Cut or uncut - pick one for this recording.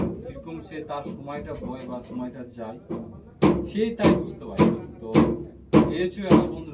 uncut